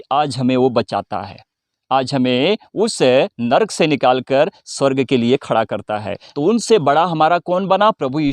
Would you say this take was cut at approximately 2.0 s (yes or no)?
no